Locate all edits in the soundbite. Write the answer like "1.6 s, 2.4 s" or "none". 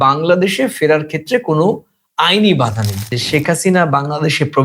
3.1 s

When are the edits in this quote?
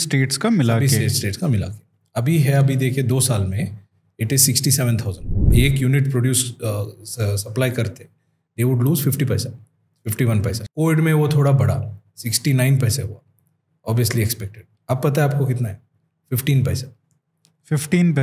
5.5 s, 10.6 s

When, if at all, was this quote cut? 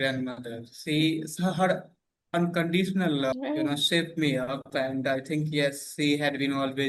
3.3 s

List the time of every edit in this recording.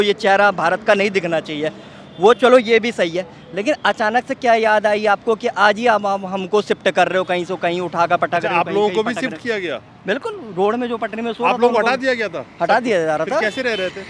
none

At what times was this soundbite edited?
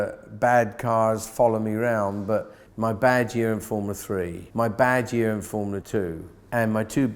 2.6 s, 4.4 s, 6.0 s

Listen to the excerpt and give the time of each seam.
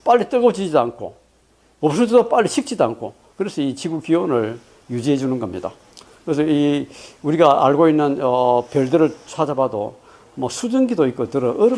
9.5 s

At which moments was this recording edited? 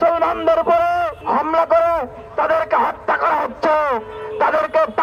1.2 s

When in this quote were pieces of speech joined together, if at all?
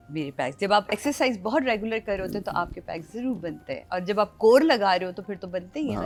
none

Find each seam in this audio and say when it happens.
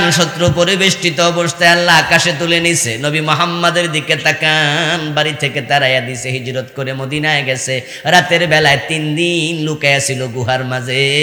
none

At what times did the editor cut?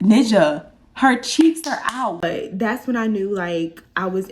2.2 s

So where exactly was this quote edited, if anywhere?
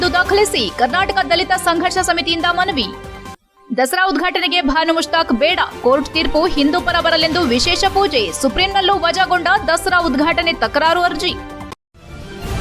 11.6 s

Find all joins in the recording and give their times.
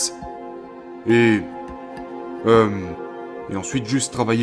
none

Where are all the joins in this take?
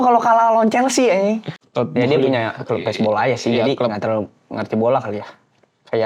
1.6 s

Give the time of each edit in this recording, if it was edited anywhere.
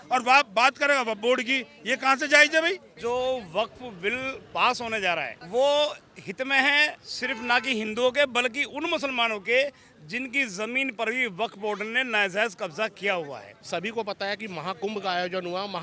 2.9 s, 5.4 s, 7.1 s, 13.5 s

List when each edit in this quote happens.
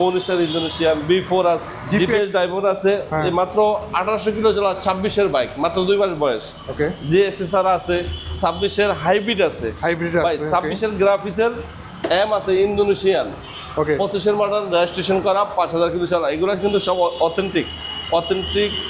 1.7 s

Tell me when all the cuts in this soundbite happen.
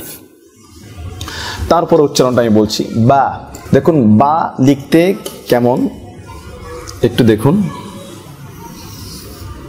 3.6 s

